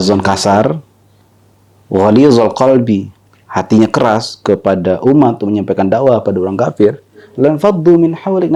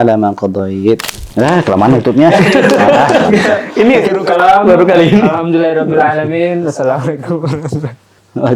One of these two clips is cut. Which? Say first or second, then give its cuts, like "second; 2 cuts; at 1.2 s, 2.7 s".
second; 1 cut; at 1.2 s